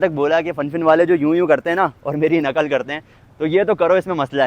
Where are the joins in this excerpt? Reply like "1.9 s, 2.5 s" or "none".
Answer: none